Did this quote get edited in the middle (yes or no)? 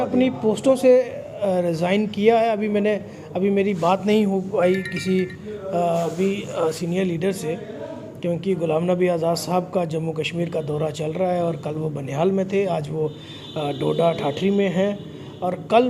no